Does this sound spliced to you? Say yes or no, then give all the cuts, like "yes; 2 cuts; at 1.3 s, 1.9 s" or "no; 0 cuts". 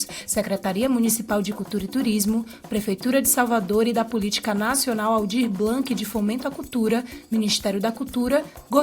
no; 0 cuts